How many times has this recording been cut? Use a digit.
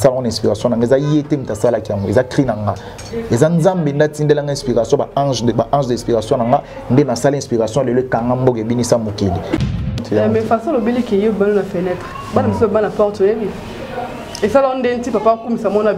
1